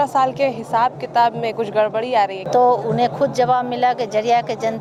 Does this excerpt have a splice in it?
no; 0 cuts

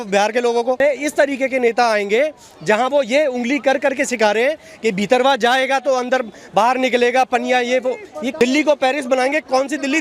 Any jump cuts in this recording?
yes; 2 cuts; at 0.8 s, 8.3 s

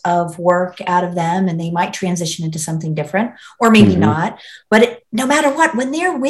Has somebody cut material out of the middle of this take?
no; 0 cuts

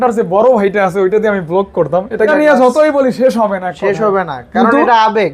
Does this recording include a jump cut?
yes; 1 cut; at 2.3 s

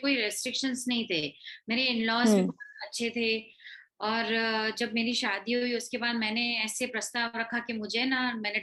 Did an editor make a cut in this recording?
no; 0 cuts

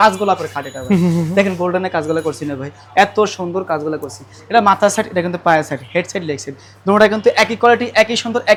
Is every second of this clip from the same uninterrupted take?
yes; 0 cuts

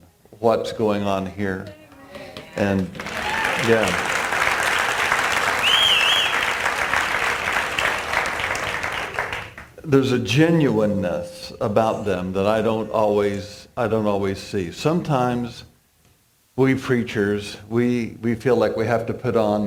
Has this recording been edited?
no; 0 cuts

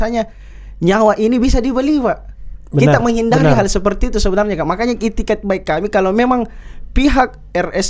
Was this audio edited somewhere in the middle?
no; 0 cuts

